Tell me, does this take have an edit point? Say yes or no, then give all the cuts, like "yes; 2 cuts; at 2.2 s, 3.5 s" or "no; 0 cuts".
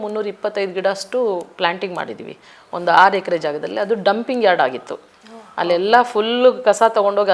no; 0 cuts